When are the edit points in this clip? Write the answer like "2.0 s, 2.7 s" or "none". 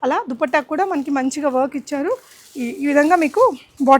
none

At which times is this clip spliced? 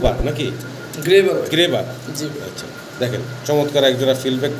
none

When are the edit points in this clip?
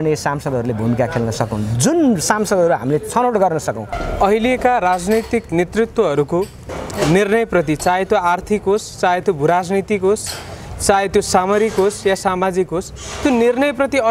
3.9 s

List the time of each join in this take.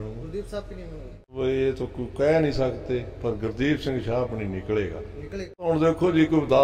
1.3 s, 5.7 s

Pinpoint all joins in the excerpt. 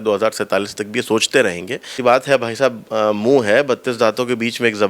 1.9 s

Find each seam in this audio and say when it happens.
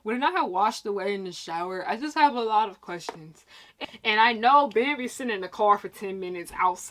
3.7 s

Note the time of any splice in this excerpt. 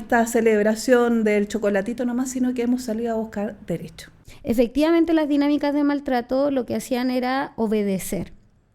4.3 s

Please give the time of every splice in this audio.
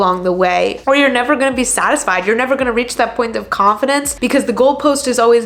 none

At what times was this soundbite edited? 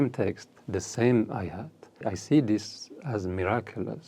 2.0 s

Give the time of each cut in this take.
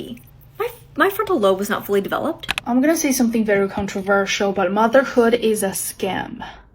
2.5 s

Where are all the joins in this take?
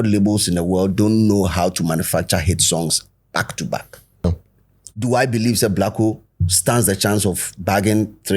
4.2 s

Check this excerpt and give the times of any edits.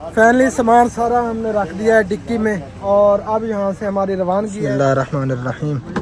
4.6 s

